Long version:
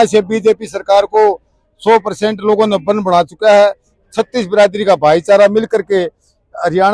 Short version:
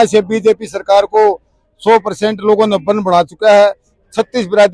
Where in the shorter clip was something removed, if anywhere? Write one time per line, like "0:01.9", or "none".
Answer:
none